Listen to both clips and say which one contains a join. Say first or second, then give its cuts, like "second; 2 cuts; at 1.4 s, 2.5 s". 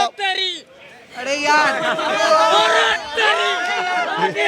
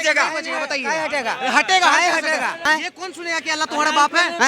second; 1 cut; at 2.6 s